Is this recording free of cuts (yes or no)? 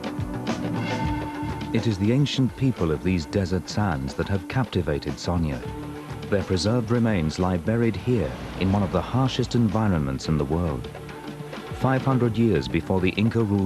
no